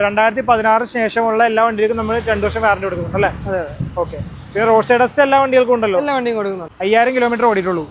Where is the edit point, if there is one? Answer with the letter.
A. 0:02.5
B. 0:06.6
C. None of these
B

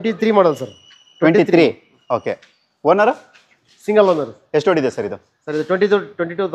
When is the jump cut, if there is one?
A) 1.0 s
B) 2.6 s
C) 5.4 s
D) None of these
D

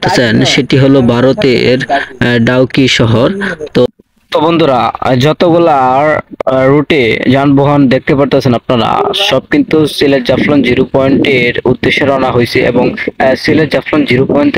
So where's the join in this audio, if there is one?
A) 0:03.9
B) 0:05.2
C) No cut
A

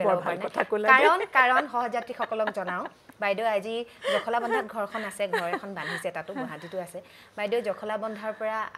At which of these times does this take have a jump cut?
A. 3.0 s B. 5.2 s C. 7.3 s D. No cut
D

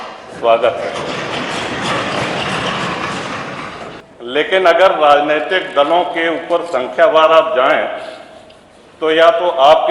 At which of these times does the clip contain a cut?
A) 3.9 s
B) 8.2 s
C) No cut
A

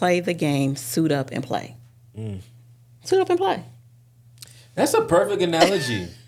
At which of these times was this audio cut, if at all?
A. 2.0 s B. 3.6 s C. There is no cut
C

